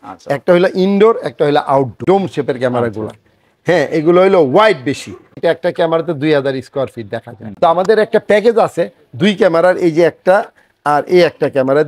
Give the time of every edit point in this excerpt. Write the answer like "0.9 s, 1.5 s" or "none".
2.0 s, 5.4 s, 7.4 s

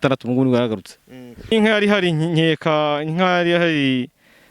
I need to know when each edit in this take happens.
1.5 s

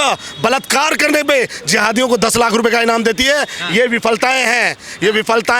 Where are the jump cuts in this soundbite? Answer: none

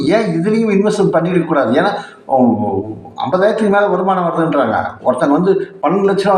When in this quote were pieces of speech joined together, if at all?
none

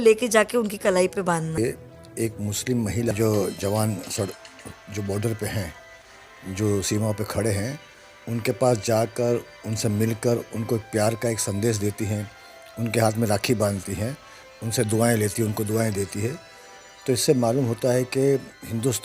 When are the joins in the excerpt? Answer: 1.6 s, 3.1 s

